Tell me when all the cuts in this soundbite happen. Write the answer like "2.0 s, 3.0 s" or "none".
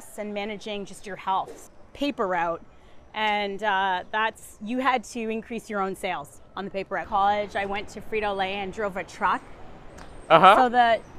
1.6 s, 7.0 s